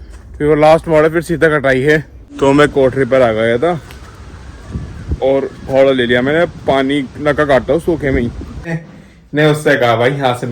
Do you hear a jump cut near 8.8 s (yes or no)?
yes